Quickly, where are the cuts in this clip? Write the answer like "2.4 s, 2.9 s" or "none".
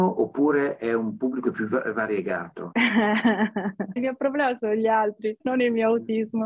2.6 s, 4.0 s, 5.4 s